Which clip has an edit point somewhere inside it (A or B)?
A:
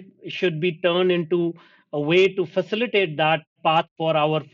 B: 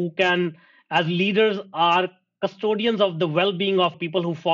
A